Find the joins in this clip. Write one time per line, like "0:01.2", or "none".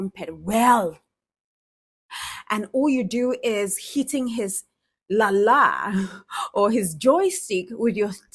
none